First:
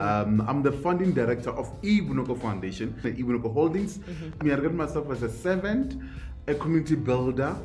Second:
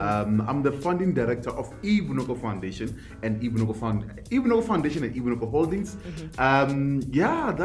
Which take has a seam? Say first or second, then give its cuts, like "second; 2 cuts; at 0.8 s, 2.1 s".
first; 3 cuts; at 3.0 s, 4.4 s, 6.3 s